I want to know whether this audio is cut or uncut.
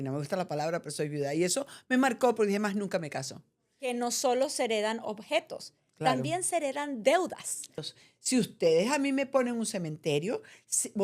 cut